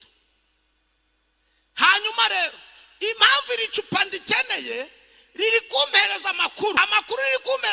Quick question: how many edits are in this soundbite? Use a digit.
1